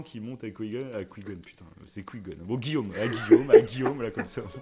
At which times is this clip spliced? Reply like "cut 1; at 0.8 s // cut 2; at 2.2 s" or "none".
none